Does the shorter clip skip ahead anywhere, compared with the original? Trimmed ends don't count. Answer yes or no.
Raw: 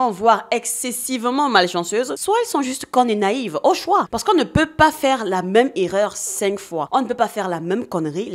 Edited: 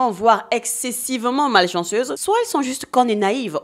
no